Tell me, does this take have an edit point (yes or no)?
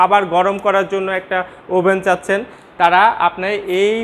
no